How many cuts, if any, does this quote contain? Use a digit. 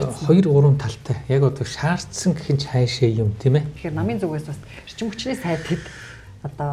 1